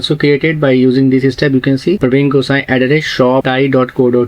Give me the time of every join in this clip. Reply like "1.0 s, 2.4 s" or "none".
2.0 s, 3.5 s